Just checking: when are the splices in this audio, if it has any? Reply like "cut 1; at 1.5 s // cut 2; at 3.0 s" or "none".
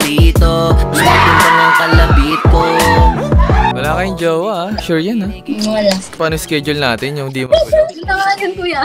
none